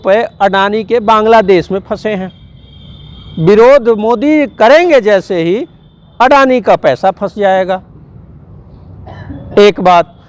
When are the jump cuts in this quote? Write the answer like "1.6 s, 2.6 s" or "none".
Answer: none